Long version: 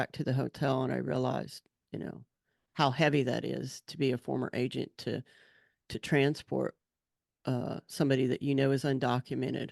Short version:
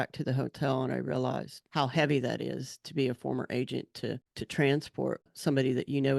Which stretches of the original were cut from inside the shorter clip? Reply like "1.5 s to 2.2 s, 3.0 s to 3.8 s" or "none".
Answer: 1.6 s to 2.6 s, 5.4 s to 5.9 s, 6.8 s to 7.8 s